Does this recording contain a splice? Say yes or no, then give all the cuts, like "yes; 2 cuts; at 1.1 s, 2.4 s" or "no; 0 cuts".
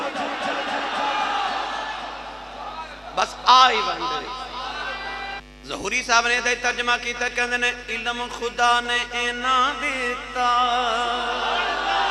yes; 1 cut; at 5.4 s